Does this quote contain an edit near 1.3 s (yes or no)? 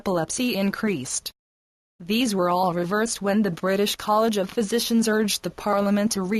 yes